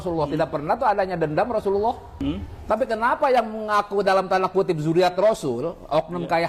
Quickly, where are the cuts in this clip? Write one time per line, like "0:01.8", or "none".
0:02.1